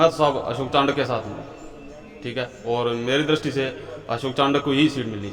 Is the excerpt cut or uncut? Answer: uncut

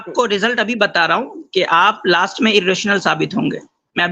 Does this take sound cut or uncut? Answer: uncut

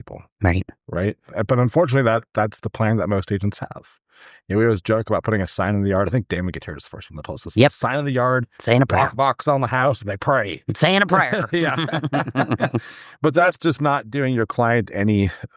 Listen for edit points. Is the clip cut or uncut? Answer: cut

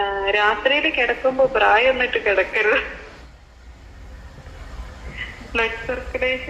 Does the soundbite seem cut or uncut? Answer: uncut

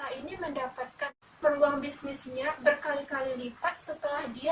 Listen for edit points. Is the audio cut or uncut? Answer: cut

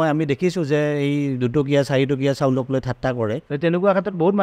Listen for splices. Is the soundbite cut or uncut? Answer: cut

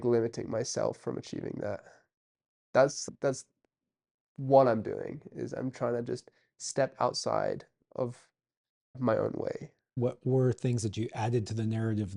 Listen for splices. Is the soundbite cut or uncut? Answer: cut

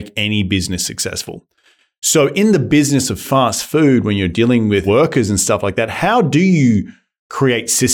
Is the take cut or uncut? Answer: cut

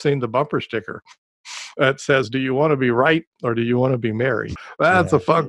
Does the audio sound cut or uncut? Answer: cut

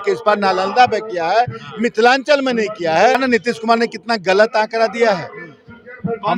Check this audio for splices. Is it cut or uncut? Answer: cut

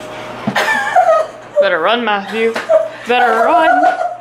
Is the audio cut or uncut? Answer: cut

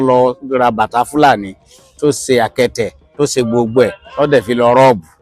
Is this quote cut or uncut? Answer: uncut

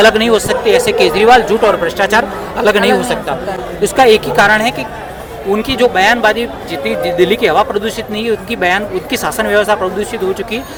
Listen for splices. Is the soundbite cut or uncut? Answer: uncut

